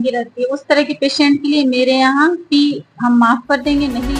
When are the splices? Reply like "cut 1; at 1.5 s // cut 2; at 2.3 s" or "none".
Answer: none

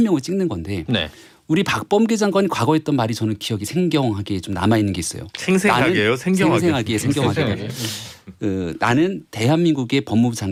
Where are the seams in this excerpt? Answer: none

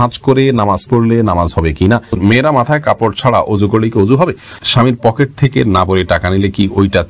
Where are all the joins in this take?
cut 1; at 2.2 s // cut 2; at 4.6 s

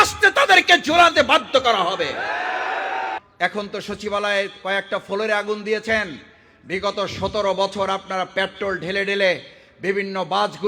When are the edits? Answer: cut 1; at 3.2 s

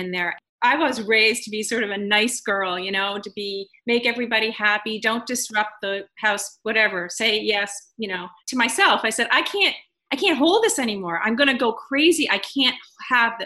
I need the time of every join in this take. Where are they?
cut 1; at 8.4 s

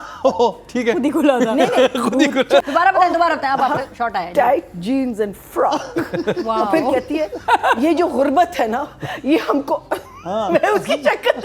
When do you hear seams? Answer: cut 1; at 2.6 s

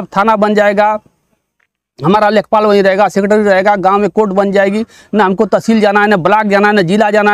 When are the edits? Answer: none

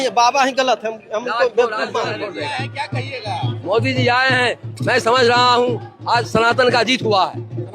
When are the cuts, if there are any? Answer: cut 1; at 2.2 s

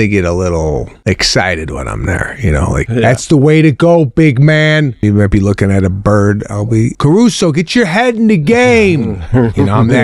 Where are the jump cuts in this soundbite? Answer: cut 1; at 0.9 s // cut 2; at 2.9 s // cut 3; at 5.0 s // cut 4; at 6.9 s

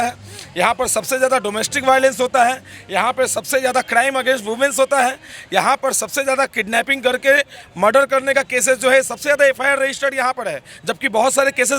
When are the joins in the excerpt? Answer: none

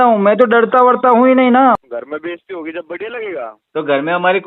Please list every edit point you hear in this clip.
cut 1; at 1.8 s

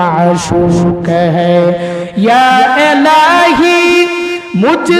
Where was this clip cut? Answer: none

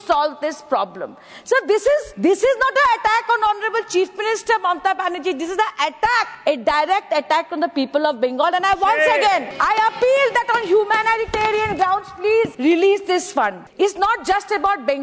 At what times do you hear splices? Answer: cut 1; at 2.1 s // cut 2; at 6.3 s // cut 3; at 9.5 s // cut 4; at 12.5 s // cut 5; at 13.6 s

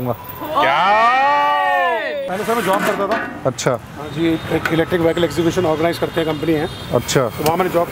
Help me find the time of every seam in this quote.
cut 1; at 2.3 s

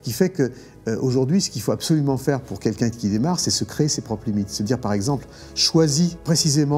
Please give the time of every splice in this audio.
none

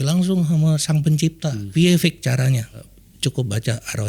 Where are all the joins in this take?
cut 1; at 1.6 s // cut 2; at 2.9 s

